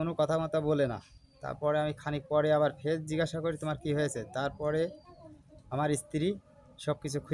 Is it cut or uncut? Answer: uncut